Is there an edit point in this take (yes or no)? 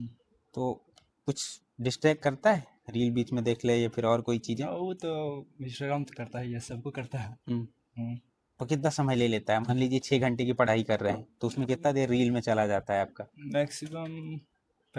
no